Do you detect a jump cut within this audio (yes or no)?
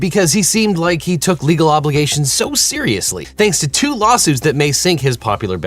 yes